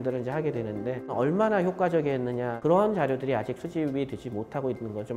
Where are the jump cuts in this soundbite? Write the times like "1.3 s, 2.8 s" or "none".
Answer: 1.1 s, 2.5 s